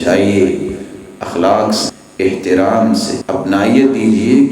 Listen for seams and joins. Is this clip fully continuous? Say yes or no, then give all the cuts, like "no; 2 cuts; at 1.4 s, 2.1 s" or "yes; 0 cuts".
no; 2 cuts; at 2.0 s, 3.2 s